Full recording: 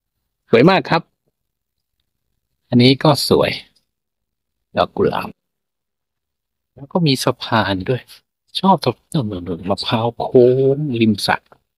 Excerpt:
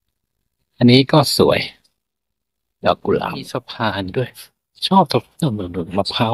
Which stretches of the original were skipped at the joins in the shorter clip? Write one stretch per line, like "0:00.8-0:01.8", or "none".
0:05.4-0:07.2

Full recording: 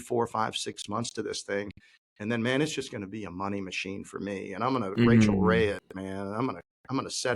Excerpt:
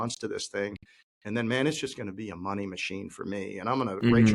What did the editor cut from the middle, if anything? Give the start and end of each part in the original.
none

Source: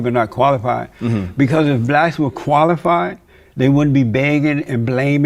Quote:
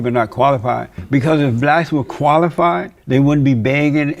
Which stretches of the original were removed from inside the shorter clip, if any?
0:01.0-0:01.2
0:03.2-0:03.4

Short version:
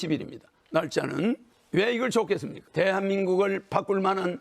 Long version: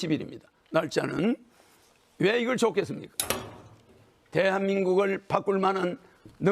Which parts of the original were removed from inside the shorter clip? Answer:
0:01.5-0:02.0
0:03.0-0:04.1

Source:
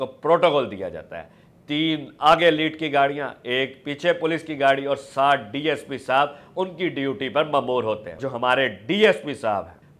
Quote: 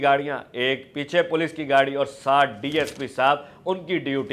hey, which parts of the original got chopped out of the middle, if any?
none

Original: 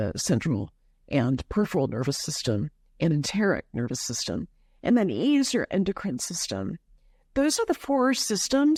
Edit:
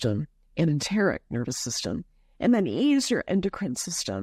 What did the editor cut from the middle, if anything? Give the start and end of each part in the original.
none

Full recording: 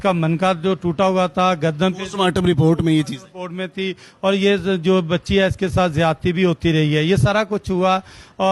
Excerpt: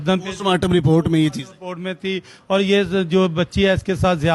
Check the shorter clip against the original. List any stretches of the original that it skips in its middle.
none

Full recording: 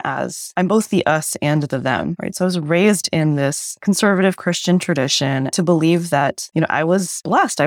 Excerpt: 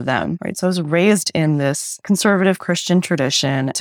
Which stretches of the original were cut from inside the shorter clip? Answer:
none

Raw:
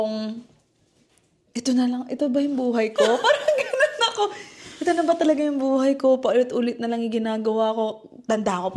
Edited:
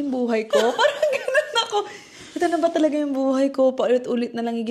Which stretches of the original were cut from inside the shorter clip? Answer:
none

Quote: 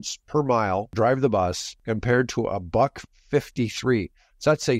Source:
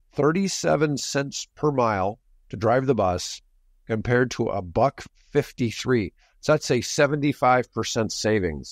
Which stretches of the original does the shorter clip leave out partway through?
0:02.2-0:02.5
0:03.3-0:03.7

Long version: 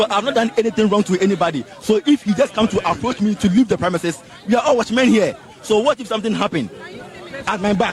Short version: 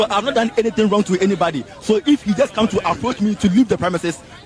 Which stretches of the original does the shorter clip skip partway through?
none

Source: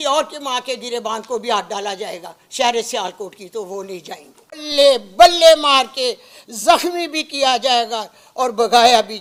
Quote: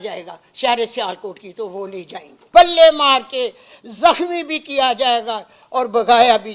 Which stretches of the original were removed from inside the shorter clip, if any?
0:04.4-0:05.1

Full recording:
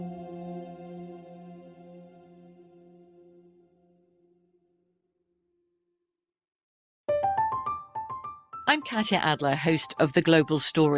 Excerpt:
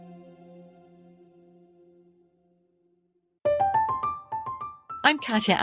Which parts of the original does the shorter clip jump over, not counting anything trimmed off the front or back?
0:04.7-0:06.9

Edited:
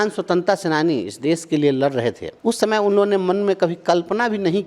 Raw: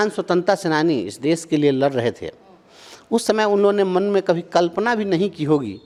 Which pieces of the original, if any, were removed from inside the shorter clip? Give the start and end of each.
0:02.3-0:02.9

